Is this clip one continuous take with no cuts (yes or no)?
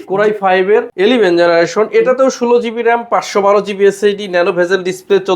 no